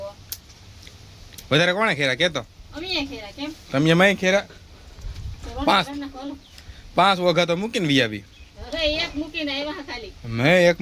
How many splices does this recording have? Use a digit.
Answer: 0